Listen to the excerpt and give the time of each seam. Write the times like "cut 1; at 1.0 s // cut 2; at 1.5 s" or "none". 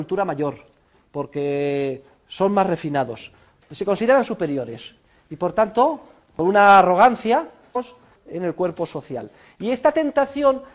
none